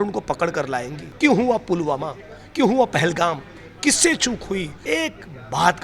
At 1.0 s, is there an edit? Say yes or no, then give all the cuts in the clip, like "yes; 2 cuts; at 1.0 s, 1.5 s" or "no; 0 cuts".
yes; 2 cuts; at 1.0 s, 4.7 s